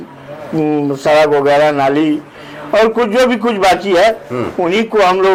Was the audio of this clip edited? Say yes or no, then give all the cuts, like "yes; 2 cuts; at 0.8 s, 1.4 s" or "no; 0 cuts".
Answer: no; 0 cuts